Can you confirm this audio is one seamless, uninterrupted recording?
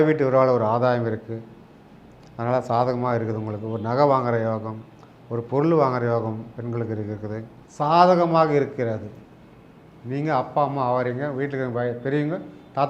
no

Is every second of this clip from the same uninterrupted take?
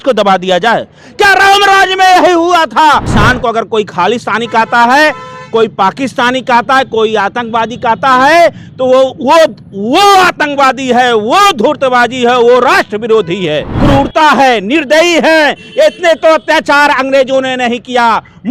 no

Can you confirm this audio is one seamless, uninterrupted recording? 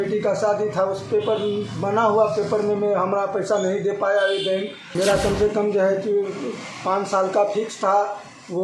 no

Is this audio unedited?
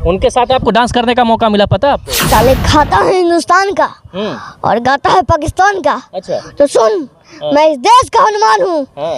no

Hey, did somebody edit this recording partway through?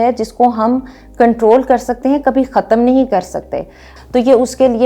yes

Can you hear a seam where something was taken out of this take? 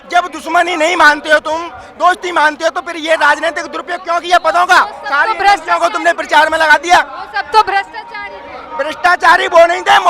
no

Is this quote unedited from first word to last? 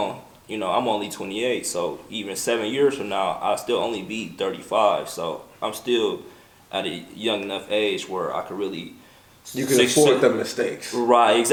yes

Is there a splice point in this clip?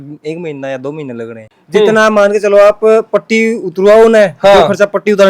yes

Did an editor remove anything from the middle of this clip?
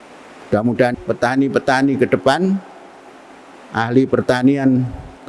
yes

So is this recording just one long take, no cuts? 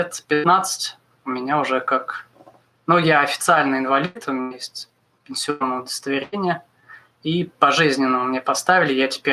yes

